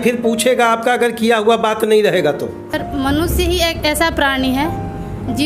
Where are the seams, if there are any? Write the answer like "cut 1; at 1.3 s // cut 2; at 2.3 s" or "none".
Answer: cut 1; at 2.7 s